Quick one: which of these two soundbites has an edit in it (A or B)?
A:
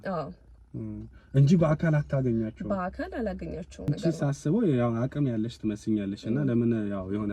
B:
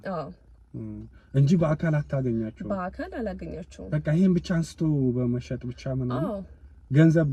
A